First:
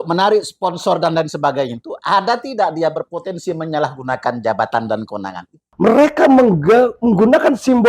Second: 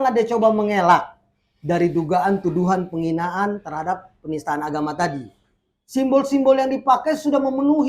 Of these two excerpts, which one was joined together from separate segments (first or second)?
first